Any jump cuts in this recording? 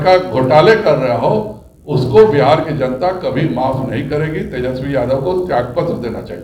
no; 0 cuts

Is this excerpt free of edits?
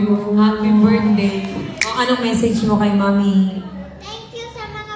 no; 1 cut; at 1.8 s

